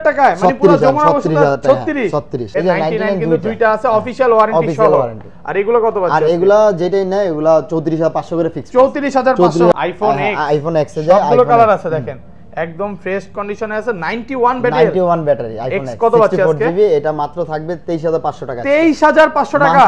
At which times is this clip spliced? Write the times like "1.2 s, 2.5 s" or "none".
2.5 s, 9.7 s